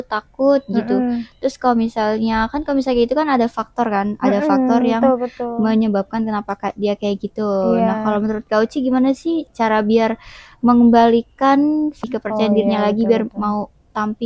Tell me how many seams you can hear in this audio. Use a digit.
2